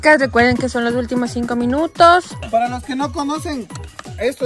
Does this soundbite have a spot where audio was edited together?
yes; 1 cut; at 2.4 s

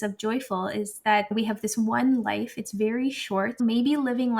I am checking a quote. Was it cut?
yes; 2 cuts; at 1.3 s, 3.5 s

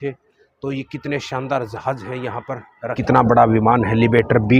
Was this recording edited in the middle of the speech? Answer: yes; 1 cut; at 3.1 s

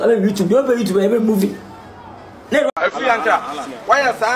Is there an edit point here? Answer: yes; 1 cut; at 2.7 s

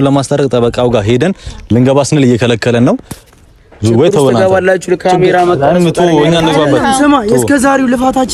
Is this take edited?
no; 0 cuts

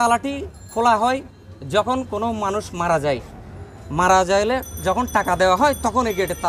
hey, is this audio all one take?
yes; 0 cuts

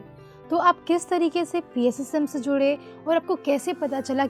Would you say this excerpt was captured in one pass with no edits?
yes; 0 cuts

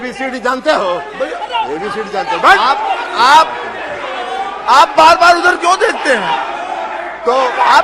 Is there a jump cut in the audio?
no; 0 cuts

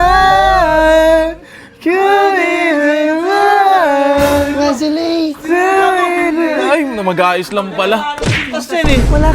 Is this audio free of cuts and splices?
yes; 0 cuts

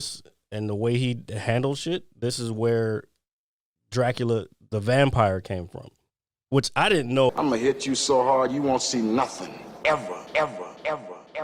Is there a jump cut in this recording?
yes; 1 cut; at 7.3 s

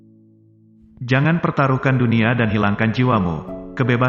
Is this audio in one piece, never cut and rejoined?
no; 1 cut; at 0.9 s

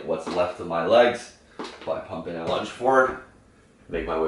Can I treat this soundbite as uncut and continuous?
no; 1 cut; at 2.3 s

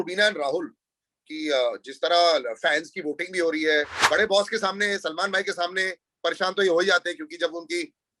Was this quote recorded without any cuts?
no; 1 cut; at 4.0 s

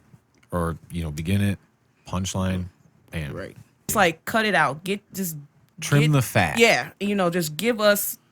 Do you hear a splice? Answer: yes; 1 cut; at 3.9 s

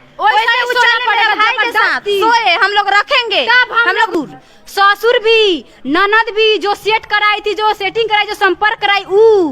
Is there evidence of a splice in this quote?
yes; 1 cut; at 4.1 s

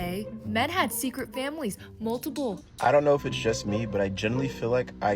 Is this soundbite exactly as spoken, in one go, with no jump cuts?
no; 1 cut; at 2.7 s

